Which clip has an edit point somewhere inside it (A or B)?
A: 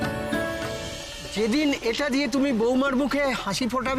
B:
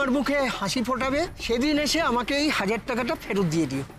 A